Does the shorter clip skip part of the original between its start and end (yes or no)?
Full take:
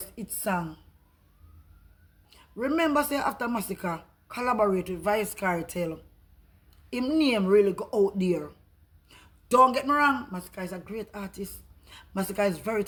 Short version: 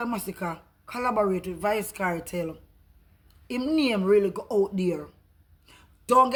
no